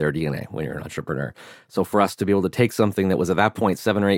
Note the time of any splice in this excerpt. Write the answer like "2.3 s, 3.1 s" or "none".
none